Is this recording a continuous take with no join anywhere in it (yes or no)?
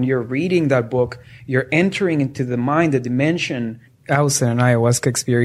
no